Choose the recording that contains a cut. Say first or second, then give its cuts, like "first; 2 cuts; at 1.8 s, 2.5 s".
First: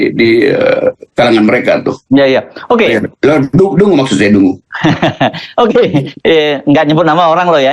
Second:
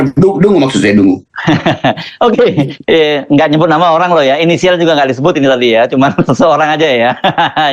first; 1 cut; at 2.0 s